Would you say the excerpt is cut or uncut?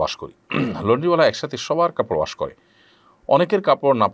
uncut